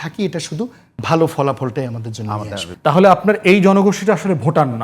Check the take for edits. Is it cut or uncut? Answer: cut